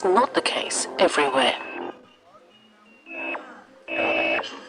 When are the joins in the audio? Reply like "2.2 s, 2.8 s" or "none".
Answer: 1.6 s